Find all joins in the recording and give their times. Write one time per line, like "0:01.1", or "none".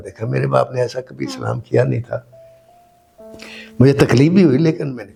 none

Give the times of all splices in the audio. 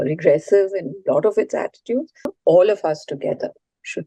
0:02.2

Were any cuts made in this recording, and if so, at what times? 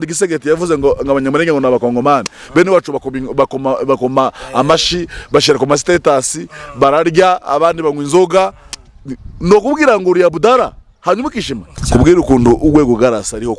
0:11.7

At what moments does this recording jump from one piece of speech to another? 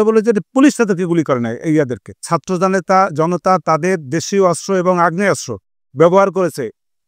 0:02.3

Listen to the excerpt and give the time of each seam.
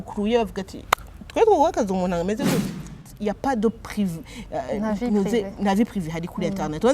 0:02.9

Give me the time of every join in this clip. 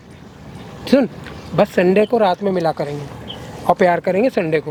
none

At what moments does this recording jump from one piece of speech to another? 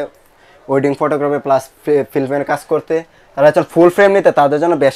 none

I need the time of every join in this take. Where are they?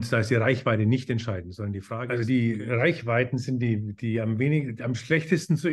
0:01.9

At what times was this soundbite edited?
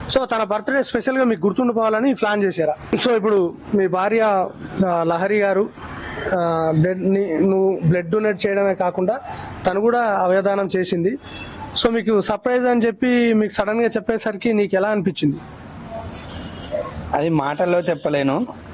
0:02.9

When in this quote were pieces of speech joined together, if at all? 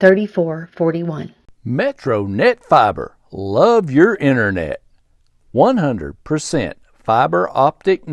0:01.4

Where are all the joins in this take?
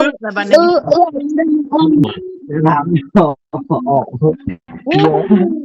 0:02.0

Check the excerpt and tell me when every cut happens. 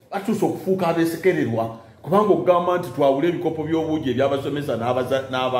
none

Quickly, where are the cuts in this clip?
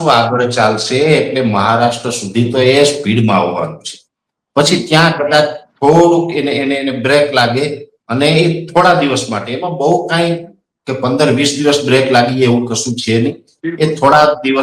none

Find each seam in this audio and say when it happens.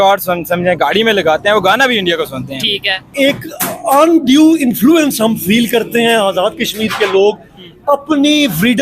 0:03.1

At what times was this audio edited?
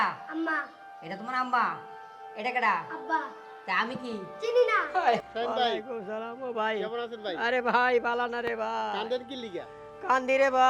0:05.2

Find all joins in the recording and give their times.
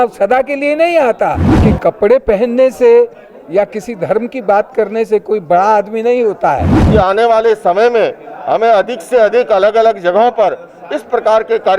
0:01.5
0:06.7

